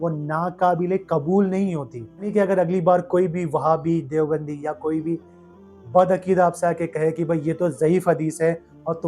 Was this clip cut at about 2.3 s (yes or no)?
yes